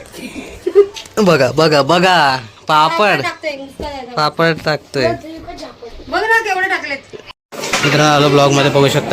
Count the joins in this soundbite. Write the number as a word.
one